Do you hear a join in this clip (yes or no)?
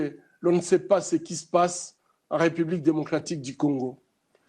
no